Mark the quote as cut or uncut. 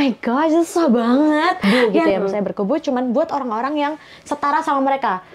cut